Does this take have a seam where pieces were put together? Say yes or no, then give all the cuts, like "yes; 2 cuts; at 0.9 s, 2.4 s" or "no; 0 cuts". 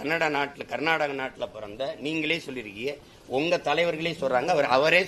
no; 0 cuts